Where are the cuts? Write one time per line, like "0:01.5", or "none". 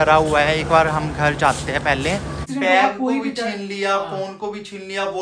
0:02.5